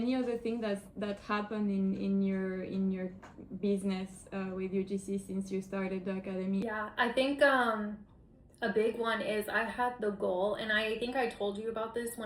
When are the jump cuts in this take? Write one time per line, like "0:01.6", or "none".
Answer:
0:06.6